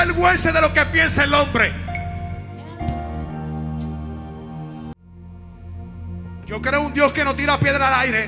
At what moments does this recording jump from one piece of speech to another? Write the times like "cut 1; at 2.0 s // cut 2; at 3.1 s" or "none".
cut 1; at 5.0 s